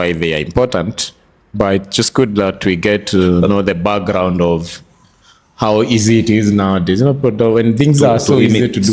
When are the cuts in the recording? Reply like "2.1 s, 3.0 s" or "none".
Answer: none